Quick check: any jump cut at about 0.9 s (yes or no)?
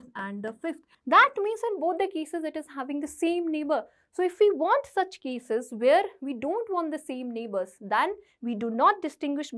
yes